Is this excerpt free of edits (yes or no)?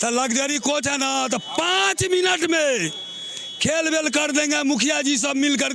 yes